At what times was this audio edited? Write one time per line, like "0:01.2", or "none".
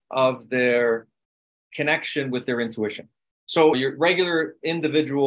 0:03.7

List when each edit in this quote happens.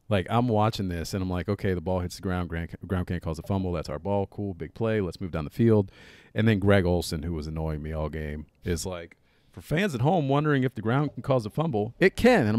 none

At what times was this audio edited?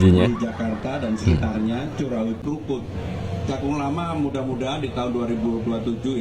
0:02.4

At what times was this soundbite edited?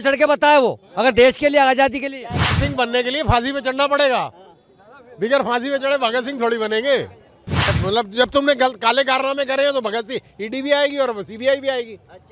0:07.7

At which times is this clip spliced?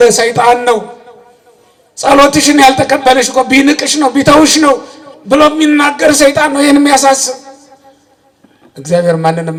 none

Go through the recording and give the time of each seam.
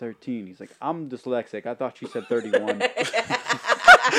none

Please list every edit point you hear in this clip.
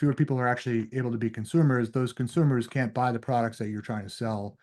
none

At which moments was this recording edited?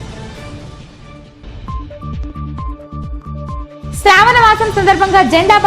0:01.2

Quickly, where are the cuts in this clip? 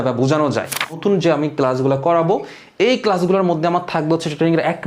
0:01.0

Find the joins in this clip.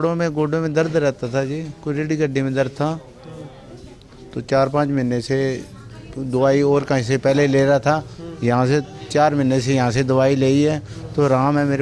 none

